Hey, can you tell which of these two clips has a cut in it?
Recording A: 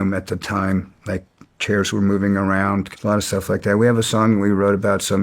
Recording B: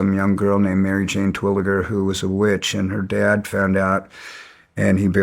A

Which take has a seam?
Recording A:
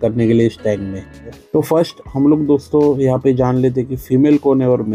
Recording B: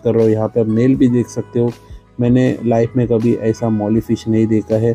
A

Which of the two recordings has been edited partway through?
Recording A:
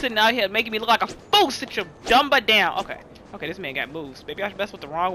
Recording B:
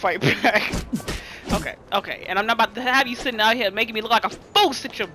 A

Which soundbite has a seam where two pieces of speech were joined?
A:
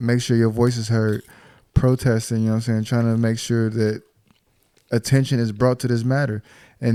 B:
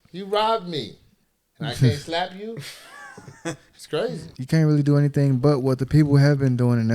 B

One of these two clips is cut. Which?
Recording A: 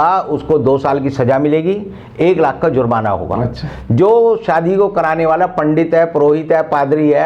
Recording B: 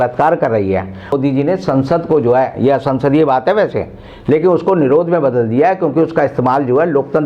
B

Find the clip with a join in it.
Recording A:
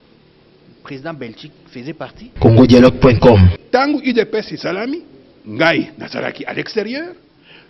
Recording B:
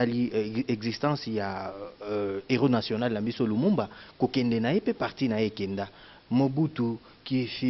A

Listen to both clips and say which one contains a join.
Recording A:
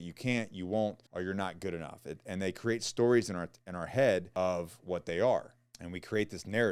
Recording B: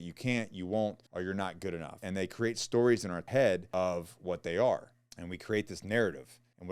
B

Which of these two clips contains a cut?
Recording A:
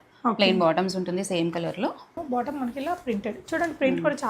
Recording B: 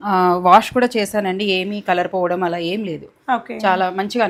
A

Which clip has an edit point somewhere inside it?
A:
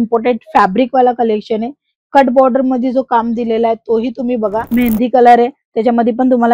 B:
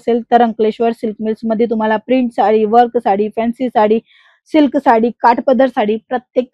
A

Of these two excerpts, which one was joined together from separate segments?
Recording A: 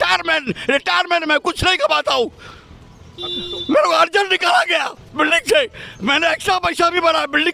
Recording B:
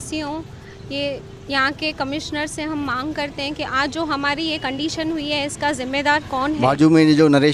B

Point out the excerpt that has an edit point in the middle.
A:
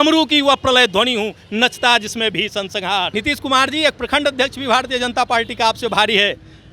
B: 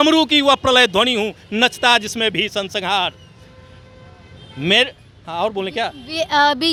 A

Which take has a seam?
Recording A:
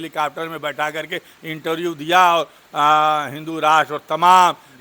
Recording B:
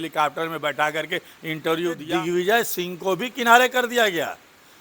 B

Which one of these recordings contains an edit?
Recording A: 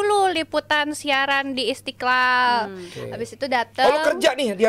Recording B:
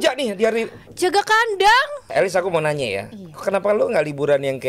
B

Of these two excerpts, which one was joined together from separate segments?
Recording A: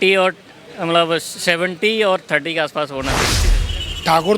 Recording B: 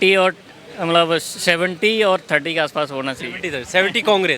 A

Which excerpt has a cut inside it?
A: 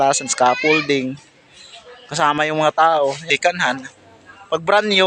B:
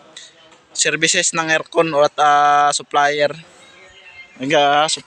A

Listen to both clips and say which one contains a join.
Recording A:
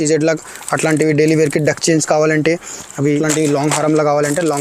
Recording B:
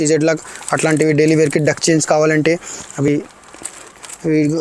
A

